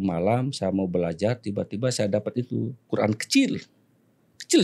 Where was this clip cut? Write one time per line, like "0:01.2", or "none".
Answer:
none